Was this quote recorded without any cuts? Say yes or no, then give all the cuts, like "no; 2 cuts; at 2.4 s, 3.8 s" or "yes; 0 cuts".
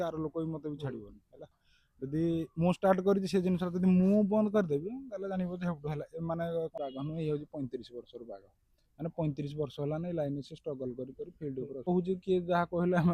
no; 2 cuts; at 6.7 s, 11.9 s